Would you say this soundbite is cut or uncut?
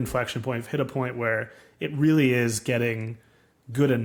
uncut